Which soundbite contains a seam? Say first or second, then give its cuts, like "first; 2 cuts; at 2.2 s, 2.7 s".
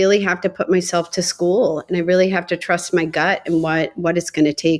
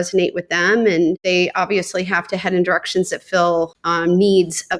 second; 2 cuts; at 1.2 s, 3.8 s